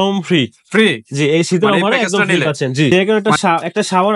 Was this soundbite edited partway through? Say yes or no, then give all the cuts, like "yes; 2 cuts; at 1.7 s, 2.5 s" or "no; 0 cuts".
yes; 1 cut; at 2.9 s